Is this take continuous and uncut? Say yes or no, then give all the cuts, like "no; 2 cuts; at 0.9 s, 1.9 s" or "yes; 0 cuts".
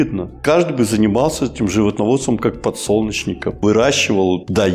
yes; 0 cuts